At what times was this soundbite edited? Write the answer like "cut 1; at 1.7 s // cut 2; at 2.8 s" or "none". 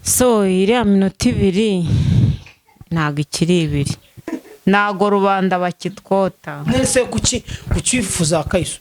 cut 1; at 4.2 s